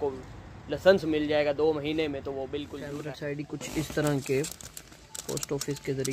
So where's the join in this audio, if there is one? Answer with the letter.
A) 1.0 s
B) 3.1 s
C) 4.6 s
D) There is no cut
B